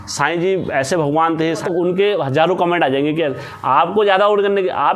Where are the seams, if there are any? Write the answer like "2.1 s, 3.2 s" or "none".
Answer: 1.6 s